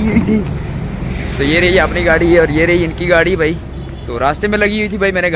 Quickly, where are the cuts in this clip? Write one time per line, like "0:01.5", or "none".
none